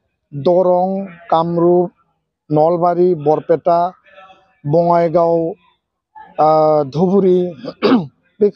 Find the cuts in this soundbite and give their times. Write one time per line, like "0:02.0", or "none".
none